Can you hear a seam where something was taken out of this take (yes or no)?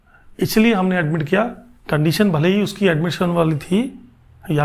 no